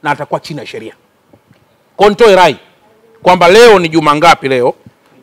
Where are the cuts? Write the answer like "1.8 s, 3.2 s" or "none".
none